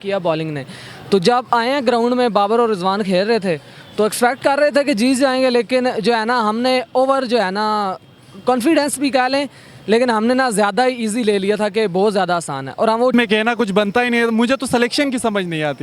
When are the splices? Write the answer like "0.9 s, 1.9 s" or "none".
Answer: 13.1 s